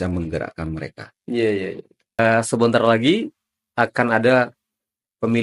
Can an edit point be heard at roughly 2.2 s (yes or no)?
yes